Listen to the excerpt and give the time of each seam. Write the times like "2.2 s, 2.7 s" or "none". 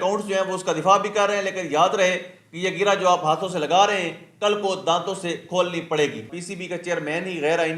6.4 s